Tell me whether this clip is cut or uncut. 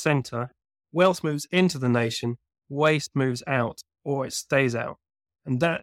uncut